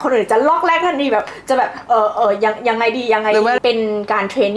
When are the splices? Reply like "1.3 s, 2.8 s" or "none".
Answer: 3.6 s